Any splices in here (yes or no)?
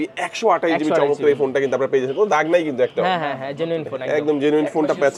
no